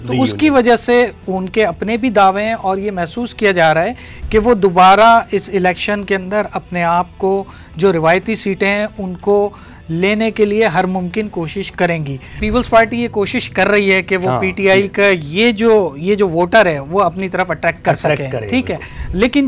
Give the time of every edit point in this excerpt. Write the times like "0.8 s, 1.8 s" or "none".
12.3 s